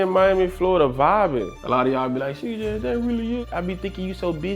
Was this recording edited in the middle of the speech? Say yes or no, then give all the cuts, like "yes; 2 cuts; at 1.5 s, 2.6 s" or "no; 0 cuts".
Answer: yes; 2 cuts; at 1.5 s, 3.4 s